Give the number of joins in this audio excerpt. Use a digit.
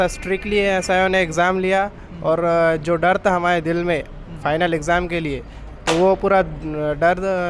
0